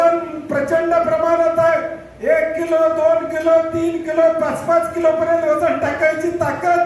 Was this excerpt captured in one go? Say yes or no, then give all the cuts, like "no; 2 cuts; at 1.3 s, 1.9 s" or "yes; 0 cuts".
yes; 0 cuts